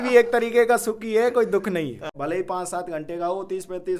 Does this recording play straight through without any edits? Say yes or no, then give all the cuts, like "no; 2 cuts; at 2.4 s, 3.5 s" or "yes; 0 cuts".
no; 1 cut; at 2.1 s